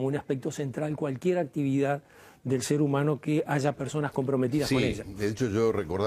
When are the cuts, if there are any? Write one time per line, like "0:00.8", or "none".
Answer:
none

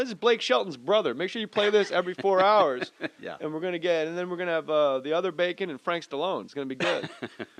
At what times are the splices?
0:01.1

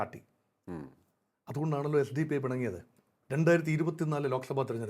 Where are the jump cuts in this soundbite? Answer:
none

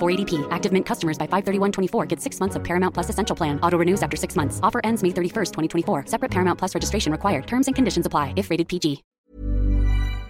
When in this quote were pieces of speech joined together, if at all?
0:09.1

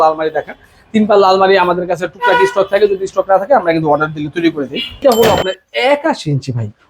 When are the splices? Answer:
0:05.0

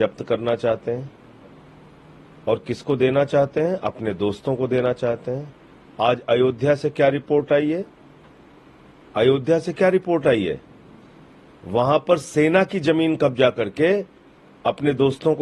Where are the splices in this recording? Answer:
none

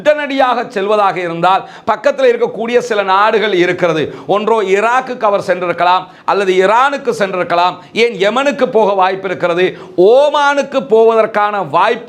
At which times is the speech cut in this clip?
none

